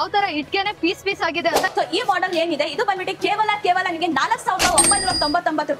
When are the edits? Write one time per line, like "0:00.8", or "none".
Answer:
0:01.7